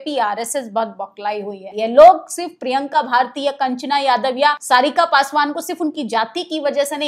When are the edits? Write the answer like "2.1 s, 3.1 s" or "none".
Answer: 1.6 s, 4.6 s